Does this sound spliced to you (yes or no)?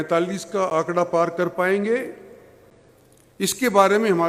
no